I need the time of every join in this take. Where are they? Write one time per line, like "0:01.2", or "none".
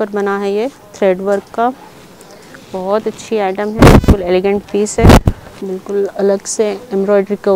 none